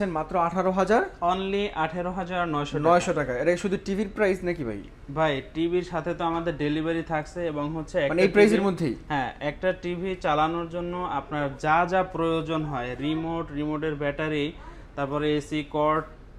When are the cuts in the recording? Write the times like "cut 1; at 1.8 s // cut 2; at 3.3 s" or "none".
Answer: none